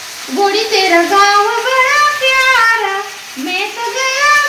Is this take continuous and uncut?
yes; 0 cuts

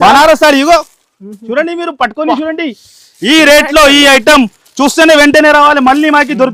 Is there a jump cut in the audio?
no; 0 cuts

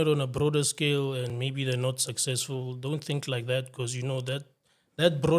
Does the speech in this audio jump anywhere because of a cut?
no; 0 cuts

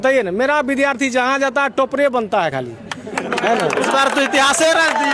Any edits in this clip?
no; 0 cuts

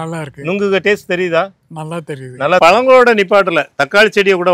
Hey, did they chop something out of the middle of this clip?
yes; 1 cut; at 2.6 s

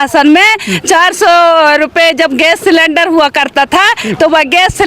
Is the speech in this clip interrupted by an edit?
no; 0 cuts

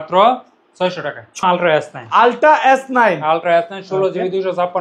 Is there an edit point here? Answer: yes; 1 cut; at 1.4 s

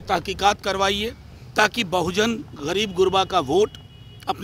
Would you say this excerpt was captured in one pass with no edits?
yes; 0 cuts

